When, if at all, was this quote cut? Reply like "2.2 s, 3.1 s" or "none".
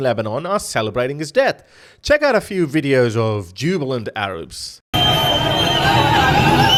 none

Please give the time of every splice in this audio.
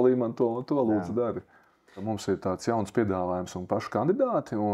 2.0 s

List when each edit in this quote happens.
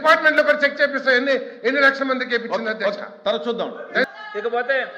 4.1 s

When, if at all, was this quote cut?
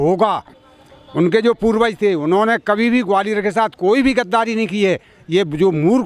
none

